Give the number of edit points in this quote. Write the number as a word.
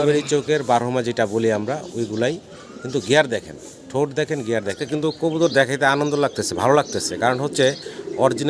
one